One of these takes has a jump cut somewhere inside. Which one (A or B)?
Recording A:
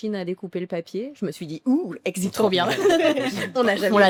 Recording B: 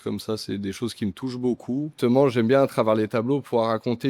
B